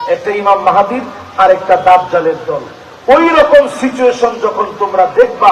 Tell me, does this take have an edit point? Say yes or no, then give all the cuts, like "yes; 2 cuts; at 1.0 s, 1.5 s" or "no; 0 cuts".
no; 0 cuts